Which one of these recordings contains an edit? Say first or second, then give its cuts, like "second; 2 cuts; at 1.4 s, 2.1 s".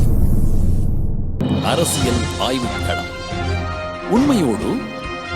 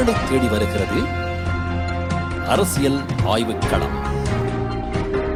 first; 1 cut; at 1.4 s